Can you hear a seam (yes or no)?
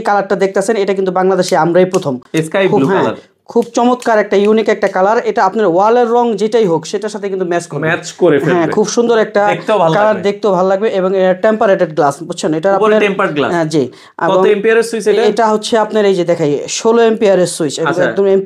no